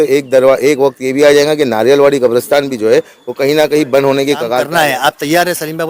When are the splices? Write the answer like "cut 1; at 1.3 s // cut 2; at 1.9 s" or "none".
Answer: cut 1; at 4.6 s